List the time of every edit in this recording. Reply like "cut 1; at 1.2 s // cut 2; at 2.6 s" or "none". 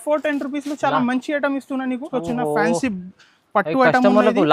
cut 1; at 2.1 s